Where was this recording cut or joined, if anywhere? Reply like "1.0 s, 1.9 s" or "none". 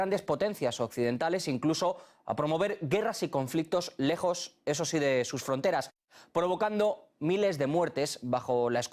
1.6 s